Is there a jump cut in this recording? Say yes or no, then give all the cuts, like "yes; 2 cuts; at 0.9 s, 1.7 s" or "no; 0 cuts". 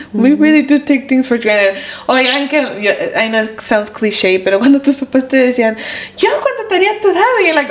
no; 0 cuts